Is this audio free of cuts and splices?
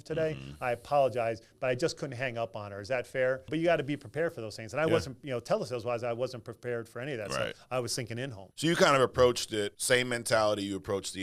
no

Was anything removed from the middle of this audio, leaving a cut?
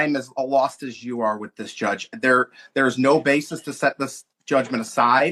no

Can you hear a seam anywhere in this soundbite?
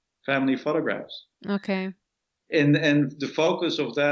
no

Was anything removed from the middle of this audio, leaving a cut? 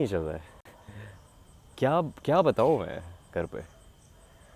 no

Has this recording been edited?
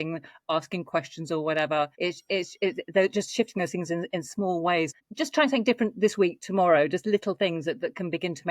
yes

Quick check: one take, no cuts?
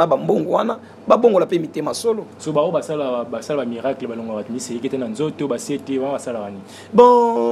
yes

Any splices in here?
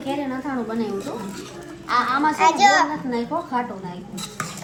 no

